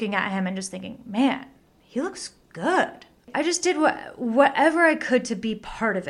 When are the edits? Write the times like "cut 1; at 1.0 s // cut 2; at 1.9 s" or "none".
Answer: cut 1; at 3.3 s

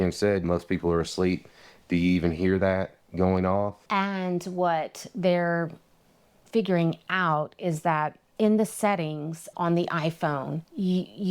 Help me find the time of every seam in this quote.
cut 1; at 3.8 s

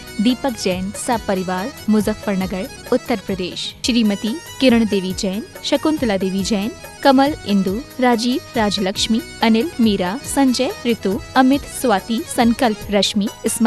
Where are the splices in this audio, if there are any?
cut 1; at 3.6 s

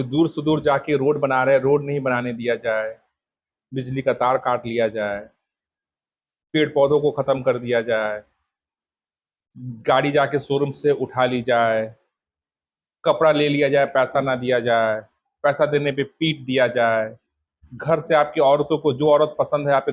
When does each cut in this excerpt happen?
none

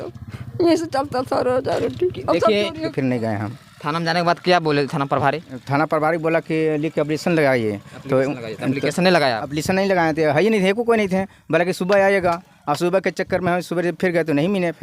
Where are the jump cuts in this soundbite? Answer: cut 1; at 2.7 s

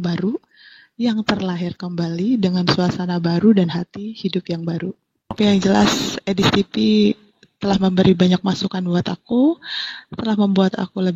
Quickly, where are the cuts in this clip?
cut 1; at 5.4 s

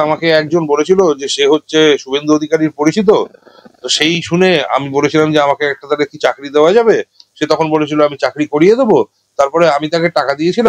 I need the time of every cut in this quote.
none

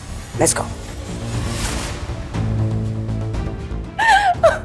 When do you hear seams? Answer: none

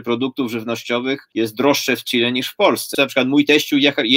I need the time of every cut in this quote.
cut 1; at 1.3 s // cut 2; at 2.9 s

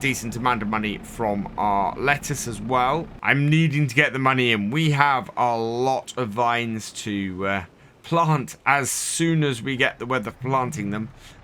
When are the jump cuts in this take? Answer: cut 1; at 3.2 s

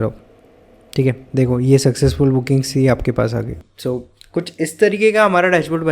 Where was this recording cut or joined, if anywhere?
cut 1; at 3.7 s

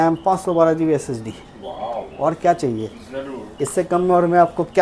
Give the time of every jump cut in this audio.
none

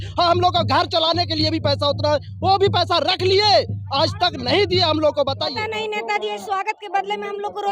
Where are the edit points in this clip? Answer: cut 1; at 5.5 s

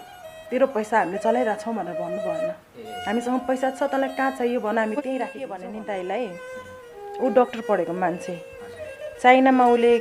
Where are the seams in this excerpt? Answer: cut 1; at 5.6 s

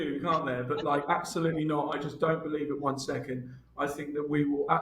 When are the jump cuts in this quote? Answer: none

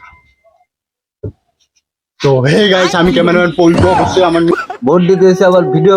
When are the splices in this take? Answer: cut 1; at 4.5 s

